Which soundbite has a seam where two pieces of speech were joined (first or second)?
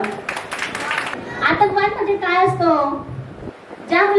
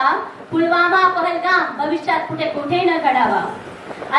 first